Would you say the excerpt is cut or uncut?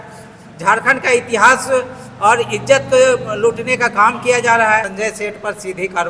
cut